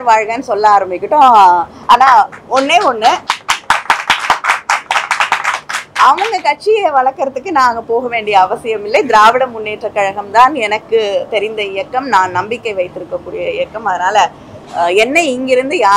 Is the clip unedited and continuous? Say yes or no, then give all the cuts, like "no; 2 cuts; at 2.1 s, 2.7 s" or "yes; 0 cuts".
yes; 0 cuts